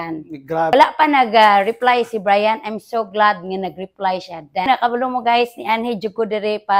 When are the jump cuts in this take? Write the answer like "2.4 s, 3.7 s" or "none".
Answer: 0.7 s, 4.7 s

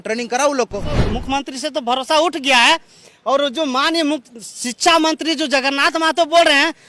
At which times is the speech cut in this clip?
1.0 s

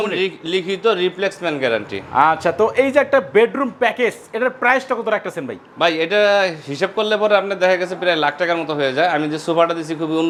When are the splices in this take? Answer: none

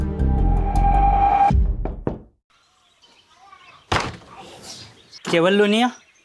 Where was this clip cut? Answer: 1.9 s

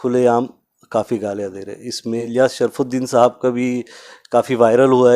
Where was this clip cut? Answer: 2.2 s

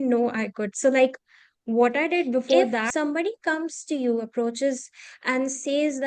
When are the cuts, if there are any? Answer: 2.9 s

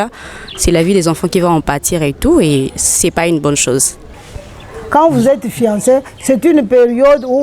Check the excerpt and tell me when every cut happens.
4.1 s

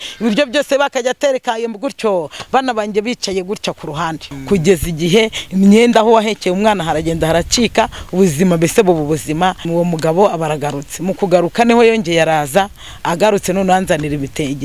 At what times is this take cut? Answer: 4.3 s, 9.6 s

